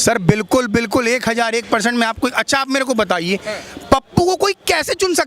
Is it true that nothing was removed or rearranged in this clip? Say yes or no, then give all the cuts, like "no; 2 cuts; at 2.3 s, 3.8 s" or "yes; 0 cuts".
yes; 0 cuts